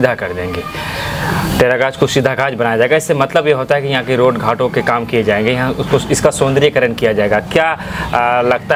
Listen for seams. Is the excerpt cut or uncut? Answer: uncut